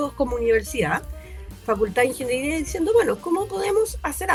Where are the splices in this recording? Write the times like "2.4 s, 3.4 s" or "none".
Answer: none